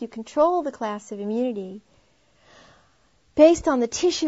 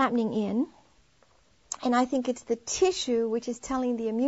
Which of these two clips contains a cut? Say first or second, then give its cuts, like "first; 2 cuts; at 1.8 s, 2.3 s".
second; 1 cut; at 2.1 s